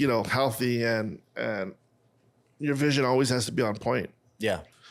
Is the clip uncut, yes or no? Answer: yes